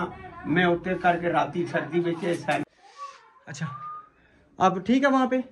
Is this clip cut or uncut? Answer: cut